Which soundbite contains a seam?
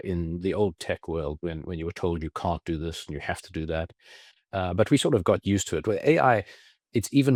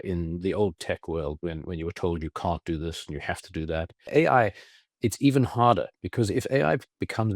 second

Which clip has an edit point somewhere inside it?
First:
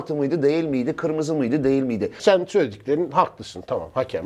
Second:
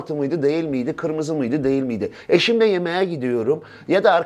first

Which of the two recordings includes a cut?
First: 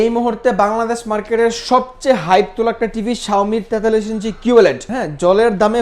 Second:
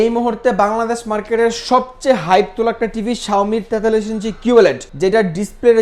first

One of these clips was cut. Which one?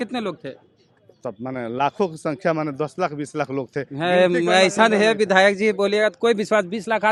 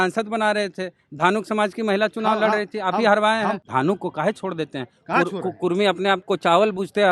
second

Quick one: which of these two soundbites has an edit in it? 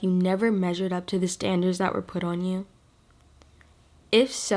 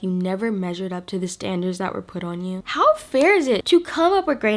second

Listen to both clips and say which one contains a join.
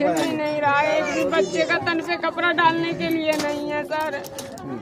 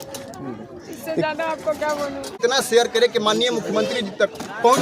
second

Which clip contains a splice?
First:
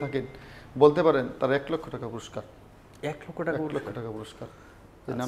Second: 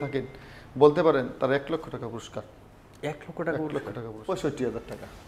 second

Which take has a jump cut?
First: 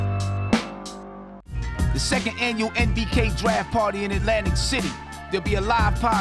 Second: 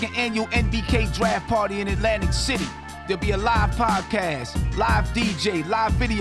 first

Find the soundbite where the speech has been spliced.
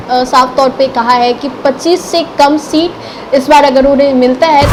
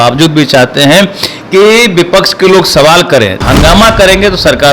second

